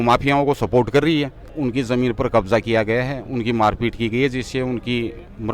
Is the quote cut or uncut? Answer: cut